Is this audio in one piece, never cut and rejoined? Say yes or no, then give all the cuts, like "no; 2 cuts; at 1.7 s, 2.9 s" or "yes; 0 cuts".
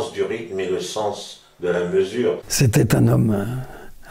no; 1 cut; at 2.5 s